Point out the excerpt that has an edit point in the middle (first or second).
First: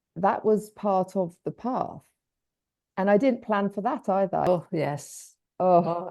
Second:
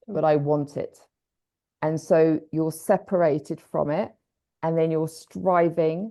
first